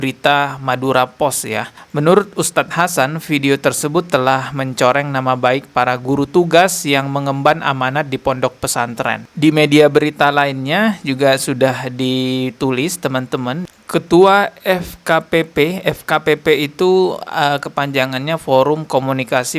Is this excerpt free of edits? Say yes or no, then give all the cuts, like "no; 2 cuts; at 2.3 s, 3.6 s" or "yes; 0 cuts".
no; 3 cuts; at 1.7 s, 9.3 s, 13.7 s